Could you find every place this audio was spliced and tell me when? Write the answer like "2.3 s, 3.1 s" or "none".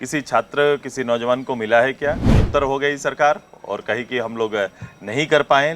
2.3 s